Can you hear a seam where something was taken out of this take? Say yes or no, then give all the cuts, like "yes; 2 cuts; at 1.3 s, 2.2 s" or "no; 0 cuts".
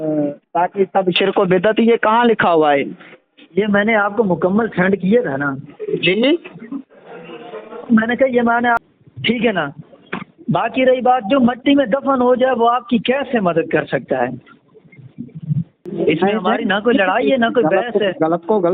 yes; 2 cuts; at 8.8 s, 15.9 s